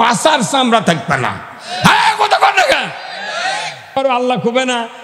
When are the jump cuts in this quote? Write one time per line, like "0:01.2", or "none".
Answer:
0:03.8